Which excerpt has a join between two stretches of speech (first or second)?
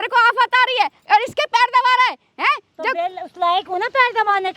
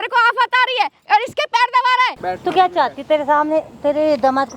second